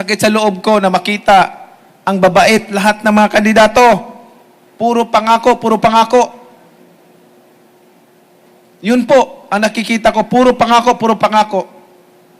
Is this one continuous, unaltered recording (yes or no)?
yes